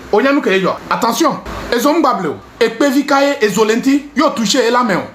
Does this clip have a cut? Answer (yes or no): yes